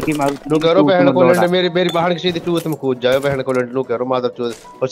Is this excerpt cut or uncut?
uncut